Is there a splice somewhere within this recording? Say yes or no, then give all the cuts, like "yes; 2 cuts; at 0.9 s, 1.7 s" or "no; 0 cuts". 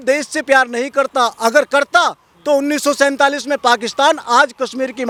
no; 0 cuts